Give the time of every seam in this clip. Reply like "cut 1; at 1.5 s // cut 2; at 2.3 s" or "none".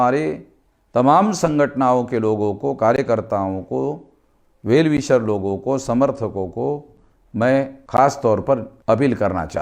cut 1; at 7.8 s // cut 2; at 8.7 s